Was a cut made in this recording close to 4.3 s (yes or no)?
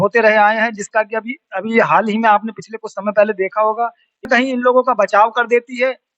yes